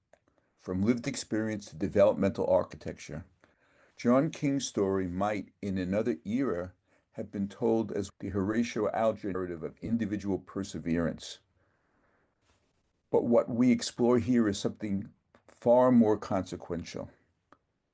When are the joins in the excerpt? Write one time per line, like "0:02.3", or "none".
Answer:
0:08.1
0:09.4